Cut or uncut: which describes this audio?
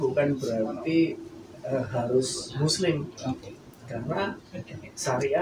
uncut